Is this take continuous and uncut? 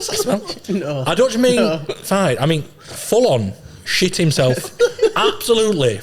yes; 0 cuts

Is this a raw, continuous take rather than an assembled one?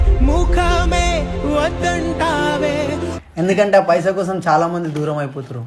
no; 1 cut; at 3.2 s

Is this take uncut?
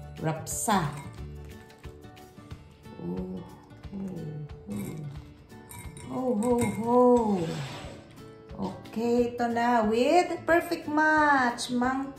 yes; 0 cuts

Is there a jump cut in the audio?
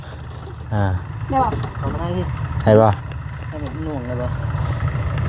no; 0 cuts

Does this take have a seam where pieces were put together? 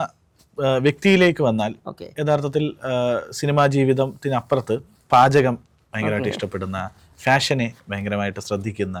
no; 0 cuts

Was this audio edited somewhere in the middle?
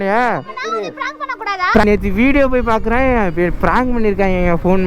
yes; 1 cut; at 1.8 s

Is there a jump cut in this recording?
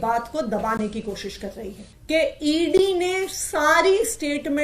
yes; 1 cut; at 1.9 s

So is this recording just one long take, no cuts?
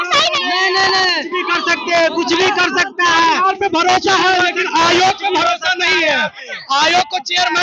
yes; 0 cuts

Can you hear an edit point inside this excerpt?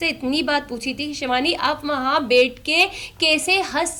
no; 0 cuts

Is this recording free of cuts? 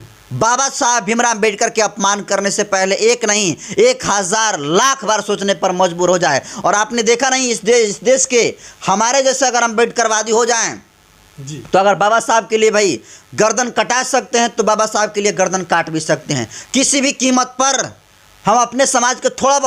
yes; 0 cuts

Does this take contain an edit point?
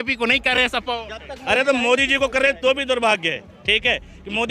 no; 0 cuts

